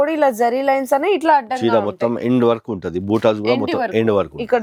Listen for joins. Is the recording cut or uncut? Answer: uncut